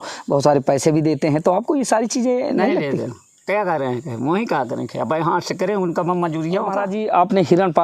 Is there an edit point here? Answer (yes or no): yes